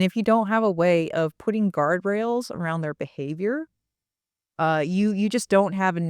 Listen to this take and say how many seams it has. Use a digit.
0